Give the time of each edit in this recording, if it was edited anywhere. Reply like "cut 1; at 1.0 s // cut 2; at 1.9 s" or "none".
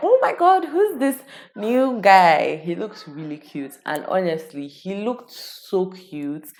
none